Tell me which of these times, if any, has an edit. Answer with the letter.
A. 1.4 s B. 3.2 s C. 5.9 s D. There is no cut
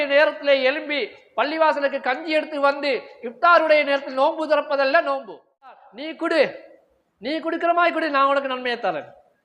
C